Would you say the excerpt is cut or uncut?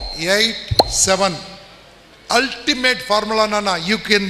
uncut